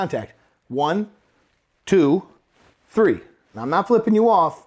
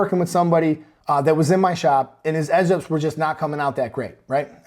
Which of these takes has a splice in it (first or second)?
second